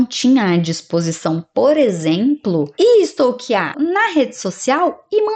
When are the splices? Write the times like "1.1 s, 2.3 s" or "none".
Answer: 3.7 s